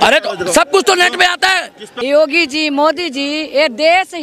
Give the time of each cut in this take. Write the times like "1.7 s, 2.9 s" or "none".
2.0 s